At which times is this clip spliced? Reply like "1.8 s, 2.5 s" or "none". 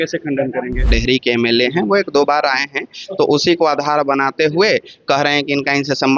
1.0 s